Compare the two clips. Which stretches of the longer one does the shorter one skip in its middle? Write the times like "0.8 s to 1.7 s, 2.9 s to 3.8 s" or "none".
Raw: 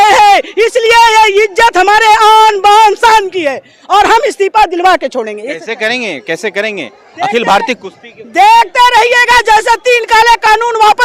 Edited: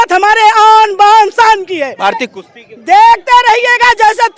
3.7 s to 7.5 s